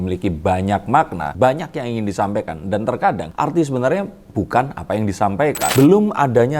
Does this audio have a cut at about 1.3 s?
yes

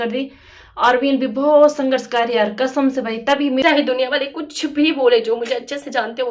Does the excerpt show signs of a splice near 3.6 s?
yes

